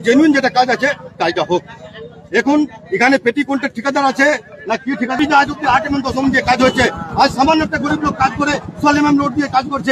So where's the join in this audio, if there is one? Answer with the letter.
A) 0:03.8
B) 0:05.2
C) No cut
B